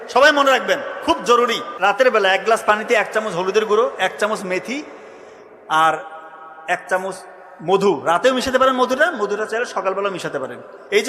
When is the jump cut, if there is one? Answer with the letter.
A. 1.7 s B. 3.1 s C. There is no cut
A